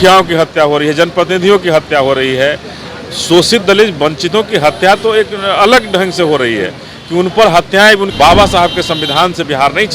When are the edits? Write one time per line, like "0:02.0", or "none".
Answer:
0:08.1